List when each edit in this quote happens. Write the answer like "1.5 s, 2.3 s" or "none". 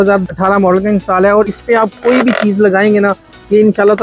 1.5 s